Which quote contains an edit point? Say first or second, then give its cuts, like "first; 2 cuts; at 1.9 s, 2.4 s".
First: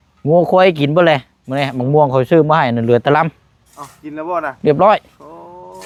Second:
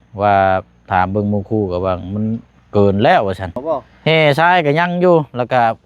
second; 1 cut; at 3.6 s